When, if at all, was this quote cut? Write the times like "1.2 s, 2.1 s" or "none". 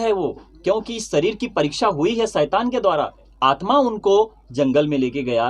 3.3 s